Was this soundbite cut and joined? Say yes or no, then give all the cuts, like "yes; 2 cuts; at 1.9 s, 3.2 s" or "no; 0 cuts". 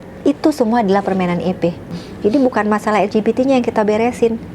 yes; 1 cut; at 1.9 s